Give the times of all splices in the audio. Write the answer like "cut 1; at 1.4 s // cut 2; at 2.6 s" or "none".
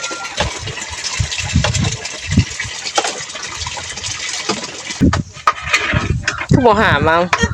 cut 1; at 4.9 s